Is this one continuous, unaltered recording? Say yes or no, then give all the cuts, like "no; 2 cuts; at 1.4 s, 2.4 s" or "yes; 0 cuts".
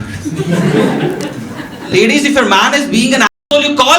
no; 1 cut; at 1.9 s